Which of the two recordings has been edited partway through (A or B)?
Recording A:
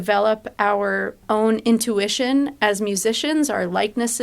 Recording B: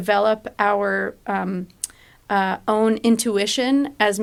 A